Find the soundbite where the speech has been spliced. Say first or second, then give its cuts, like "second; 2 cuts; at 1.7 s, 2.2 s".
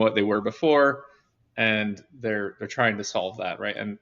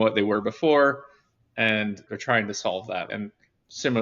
second; 2 cuts; at 2.1 s, 3.1 s